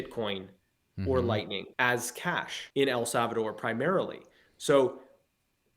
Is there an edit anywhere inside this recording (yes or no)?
yes